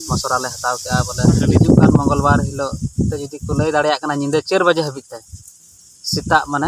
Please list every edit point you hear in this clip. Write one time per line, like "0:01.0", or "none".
0:01.5